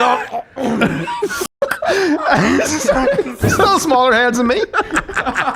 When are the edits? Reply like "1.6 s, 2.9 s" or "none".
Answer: 3.4 s